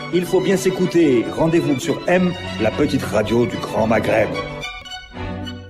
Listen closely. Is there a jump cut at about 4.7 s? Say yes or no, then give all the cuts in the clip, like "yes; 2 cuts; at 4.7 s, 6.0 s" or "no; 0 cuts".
yes; 1 cut; at 4.7 s